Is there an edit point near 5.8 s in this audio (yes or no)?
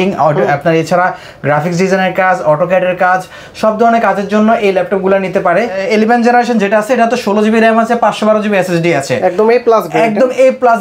yes